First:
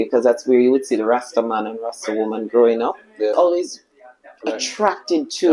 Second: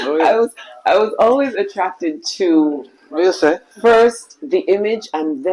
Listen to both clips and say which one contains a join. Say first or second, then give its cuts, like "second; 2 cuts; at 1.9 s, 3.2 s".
first; 1 cut; at 3.3 s